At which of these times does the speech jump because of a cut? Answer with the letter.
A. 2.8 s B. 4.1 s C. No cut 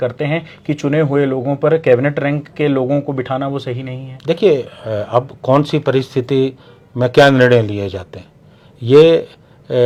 C